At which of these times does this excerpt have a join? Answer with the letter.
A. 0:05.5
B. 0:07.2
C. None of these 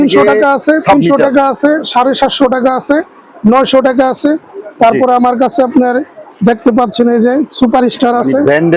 C